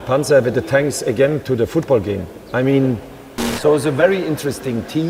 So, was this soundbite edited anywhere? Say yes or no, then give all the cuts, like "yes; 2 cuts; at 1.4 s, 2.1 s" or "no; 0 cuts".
yes; 1 cut; at 3.4 s